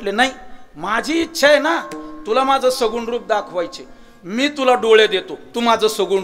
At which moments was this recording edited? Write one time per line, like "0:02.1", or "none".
none